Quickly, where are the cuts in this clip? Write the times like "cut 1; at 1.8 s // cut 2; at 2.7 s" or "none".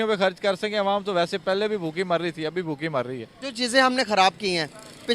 none